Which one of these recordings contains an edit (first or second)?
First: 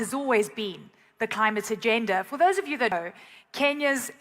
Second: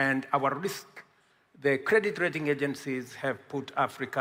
first